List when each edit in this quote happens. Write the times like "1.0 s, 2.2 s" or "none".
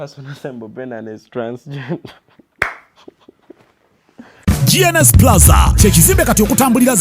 4.3 s